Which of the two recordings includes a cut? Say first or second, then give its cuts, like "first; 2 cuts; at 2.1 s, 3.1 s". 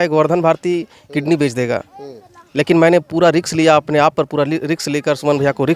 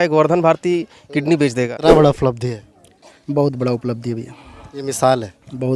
second; 1 cut; at 1.7 s